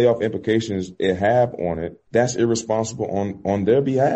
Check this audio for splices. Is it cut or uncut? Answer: cut